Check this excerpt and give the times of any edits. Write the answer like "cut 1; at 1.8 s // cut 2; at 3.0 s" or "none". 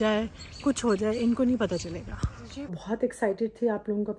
cut 1; at 2.8 s